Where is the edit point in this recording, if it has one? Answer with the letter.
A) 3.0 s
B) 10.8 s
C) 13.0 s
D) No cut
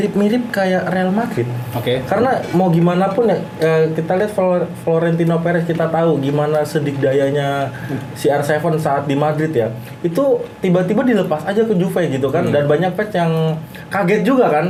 D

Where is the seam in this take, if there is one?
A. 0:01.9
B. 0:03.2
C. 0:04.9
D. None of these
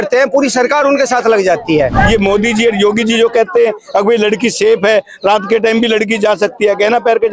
A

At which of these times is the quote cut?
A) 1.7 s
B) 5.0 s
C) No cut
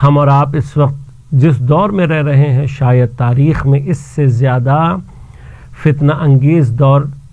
C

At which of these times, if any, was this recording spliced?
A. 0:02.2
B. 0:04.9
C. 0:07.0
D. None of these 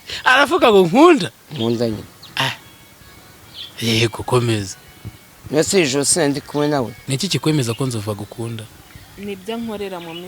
C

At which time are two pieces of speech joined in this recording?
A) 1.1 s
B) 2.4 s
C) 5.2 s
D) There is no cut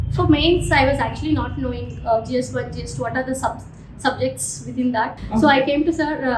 C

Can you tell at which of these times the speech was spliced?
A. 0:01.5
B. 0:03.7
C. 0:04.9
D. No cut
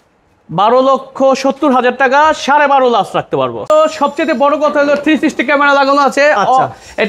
B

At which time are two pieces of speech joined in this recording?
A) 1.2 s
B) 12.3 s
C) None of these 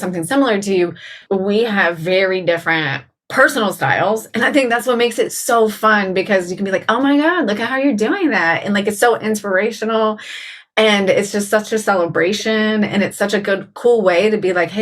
A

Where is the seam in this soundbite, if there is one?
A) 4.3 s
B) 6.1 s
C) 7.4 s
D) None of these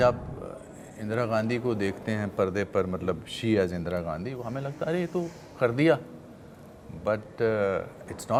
D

